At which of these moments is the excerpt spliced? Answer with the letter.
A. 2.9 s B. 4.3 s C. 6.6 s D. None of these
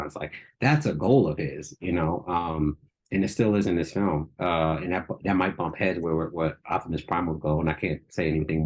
D